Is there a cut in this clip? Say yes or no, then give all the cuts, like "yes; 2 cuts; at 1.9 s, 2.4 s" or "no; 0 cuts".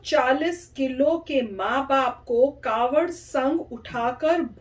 no; 0 cuts